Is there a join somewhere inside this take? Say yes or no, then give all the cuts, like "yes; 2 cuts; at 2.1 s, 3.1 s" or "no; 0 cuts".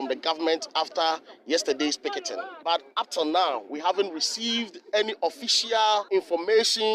yes; 2 cuts; at 2.5 s, 6.1 s